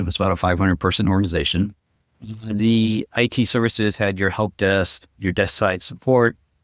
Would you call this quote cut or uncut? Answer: uncut